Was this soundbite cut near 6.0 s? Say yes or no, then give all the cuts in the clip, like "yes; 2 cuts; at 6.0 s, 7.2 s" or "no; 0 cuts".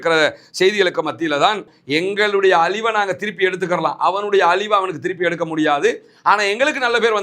no; 1 cut; at 1.7 s